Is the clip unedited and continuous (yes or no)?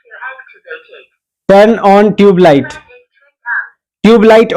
yes